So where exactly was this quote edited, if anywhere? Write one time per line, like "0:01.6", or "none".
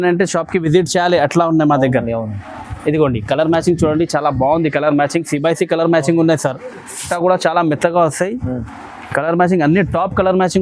0:07.0